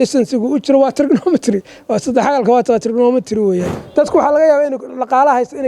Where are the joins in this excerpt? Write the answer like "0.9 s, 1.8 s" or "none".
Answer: 3.8 s